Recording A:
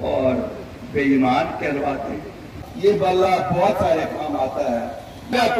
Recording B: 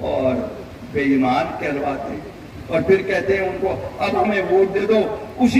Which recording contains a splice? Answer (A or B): A